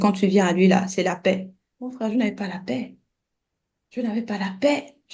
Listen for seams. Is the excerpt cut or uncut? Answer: uncut